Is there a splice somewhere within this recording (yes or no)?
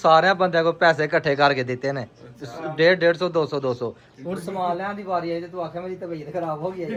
no